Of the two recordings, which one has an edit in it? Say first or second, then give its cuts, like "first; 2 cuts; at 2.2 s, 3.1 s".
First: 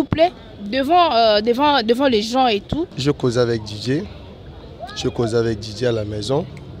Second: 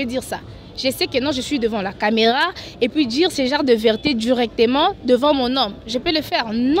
first; 1 cut; at 2.9 s